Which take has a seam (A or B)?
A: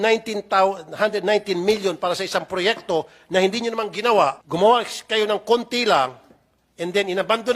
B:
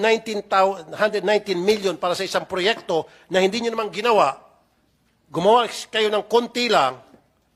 A